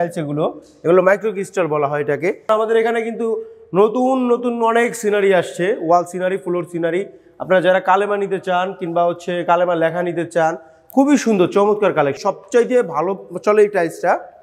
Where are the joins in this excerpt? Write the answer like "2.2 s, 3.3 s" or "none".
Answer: 2.5 s, 12.2 s